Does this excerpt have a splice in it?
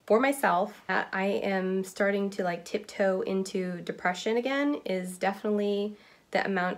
yes; 1 cut; at 0.9 s

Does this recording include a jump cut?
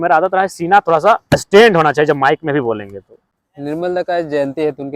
no; 0 cuts

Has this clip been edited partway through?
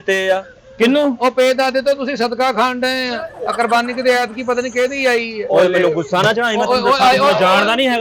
no; 0 cuts

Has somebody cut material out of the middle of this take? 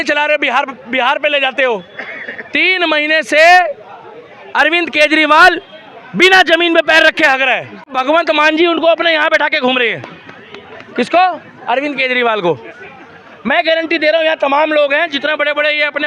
no; 0 cuts

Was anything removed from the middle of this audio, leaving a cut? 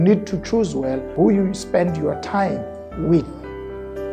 yes; 1 cut; at 1.0 s

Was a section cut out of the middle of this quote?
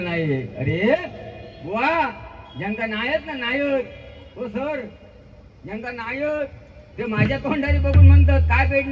no; 0 cuts

